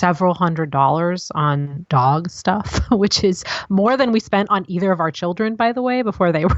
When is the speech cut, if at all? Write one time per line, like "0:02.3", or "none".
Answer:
0:01.7